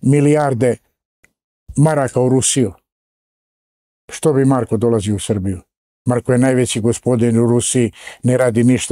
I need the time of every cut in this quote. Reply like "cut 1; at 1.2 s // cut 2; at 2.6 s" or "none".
none